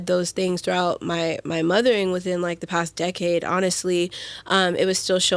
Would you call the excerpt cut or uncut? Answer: uncut